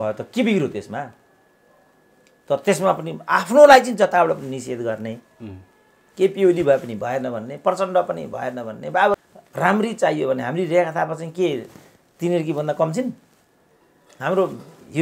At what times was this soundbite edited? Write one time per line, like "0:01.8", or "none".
0:09.1